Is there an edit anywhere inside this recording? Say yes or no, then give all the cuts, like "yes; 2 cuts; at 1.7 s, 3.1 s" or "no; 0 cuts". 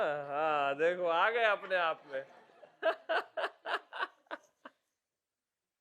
no; 0 cuts